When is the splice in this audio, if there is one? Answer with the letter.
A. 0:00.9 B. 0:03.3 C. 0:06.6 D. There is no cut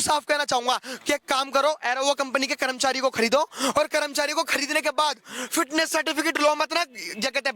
A